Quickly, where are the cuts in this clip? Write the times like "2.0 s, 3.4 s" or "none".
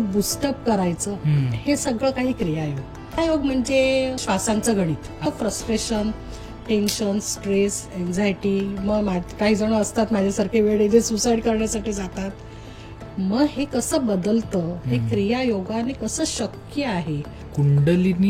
3.2 s, 4.2 s, 5.2 s, 17.4 s